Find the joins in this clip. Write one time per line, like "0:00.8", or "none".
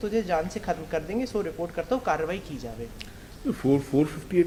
none